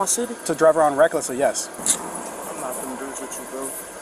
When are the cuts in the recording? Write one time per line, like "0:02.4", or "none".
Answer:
0:01.8